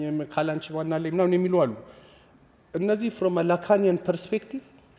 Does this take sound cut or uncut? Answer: uncut